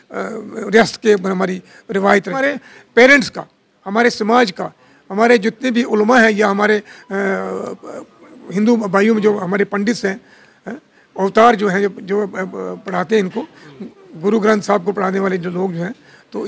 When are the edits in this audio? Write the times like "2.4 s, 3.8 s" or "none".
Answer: 2.3 s